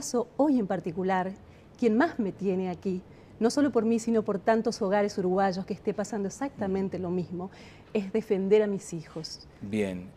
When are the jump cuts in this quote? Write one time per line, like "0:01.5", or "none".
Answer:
0:06.2